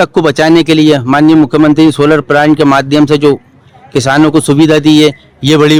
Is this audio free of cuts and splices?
yes; 0 cuts

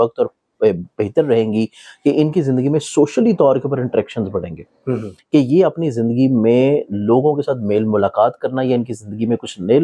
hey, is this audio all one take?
yes; 0 cuts

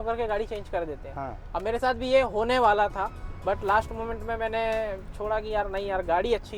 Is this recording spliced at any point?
no; 0 cuts

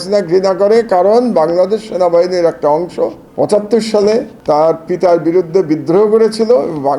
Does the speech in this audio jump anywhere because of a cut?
yes; 2 cuts; at 3.2 s, 4.3 s

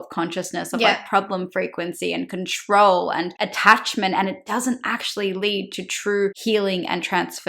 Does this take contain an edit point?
yes; 2 cuts; at 3.4 s, 6.4 s

